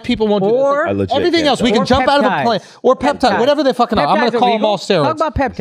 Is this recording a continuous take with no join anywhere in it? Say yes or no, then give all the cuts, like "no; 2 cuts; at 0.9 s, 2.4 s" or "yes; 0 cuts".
yes; 0 cuts